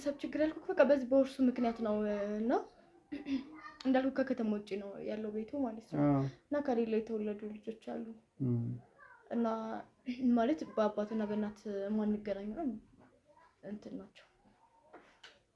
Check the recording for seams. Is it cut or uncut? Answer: uncut